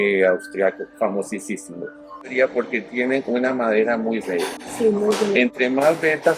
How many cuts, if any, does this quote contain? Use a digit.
1